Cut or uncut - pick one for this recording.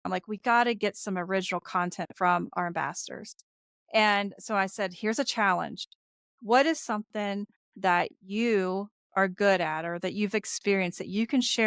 uncut